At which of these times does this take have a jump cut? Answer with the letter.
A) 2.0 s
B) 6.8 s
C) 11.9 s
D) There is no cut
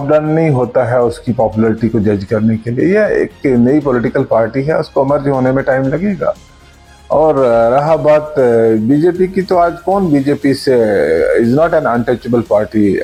D